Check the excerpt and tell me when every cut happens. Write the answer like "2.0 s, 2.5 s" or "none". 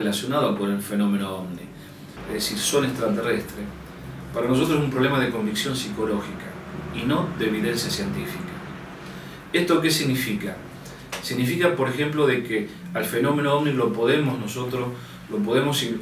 2.3 s